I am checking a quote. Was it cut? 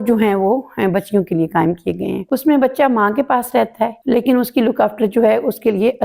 yes; 2 cuts; at 2.2 s, 4.0 s

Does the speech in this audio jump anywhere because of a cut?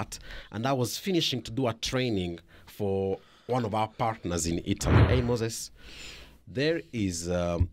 yes; 1 cut; at 5.0 s

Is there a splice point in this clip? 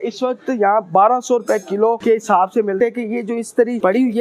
yes; 1 cut; at 2.8 s

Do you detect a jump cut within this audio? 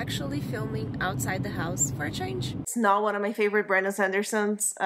yes; 1 cut; at 2.6 s

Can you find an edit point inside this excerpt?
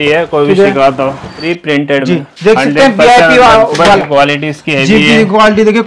yes; 2 cuts; at 1.4 s, 4.0 s

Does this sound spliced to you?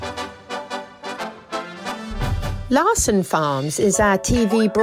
yes; 1 cut; at 2.6 s

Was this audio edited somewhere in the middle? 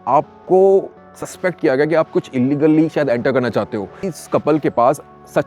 yes; 1 cut; at 4.0 s

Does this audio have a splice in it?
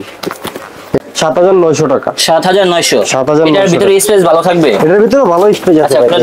yes; 1 cut; at 1.0 s

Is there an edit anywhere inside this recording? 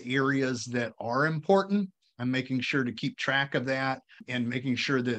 yes; 2 cuts; at 2.1 s, 4.2 s

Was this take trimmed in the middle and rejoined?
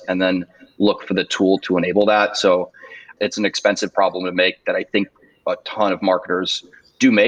yes; 1 cut; at 3.0 s

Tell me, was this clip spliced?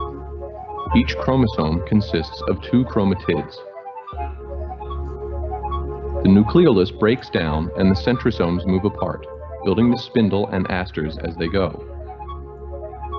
yes; 2 cuts; at 4.8 s, 6.1 s

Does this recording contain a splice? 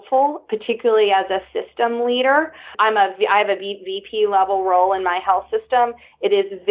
yes; 1 cut; at 2.7 s

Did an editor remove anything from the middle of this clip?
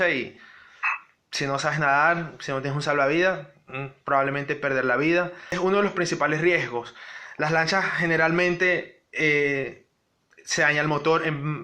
yes; 1 cut; at 5.5 s

